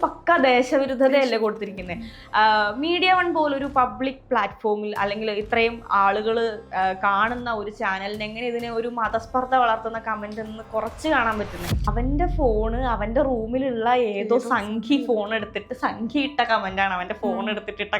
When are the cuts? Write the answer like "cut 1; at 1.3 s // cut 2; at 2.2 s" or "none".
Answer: cut 1; at 11.8 s